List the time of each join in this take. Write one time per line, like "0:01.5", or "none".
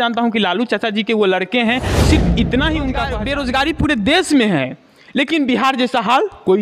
0:03.1

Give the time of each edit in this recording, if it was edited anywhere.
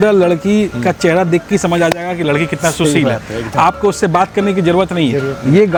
none

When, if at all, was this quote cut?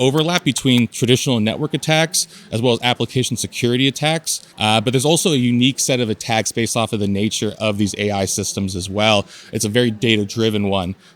none

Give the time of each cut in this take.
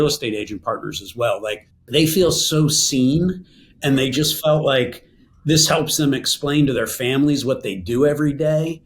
0:01.7

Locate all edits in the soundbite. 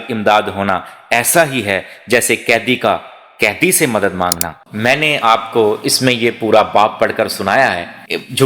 0:04.6

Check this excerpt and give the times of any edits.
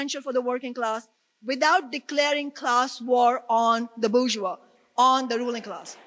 none

